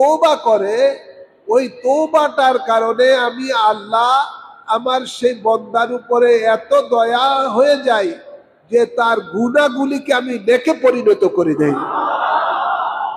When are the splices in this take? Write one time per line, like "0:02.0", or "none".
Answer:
none